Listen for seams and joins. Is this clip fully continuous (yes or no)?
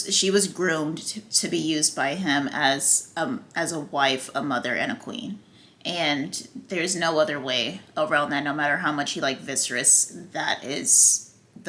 yes